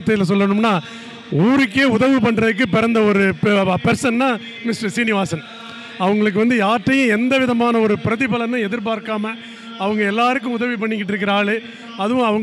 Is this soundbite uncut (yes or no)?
yes